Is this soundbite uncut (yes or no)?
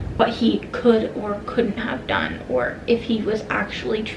yes